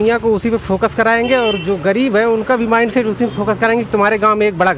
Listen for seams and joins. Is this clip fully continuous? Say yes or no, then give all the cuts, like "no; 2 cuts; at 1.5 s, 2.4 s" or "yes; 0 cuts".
yes; 0 cuts